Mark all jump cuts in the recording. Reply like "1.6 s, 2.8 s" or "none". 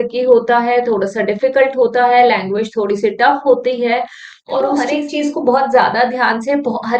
4.9 s